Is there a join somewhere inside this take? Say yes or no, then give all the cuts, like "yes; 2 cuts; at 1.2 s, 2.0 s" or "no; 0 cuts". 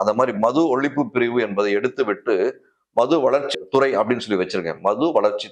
no; 0 cuts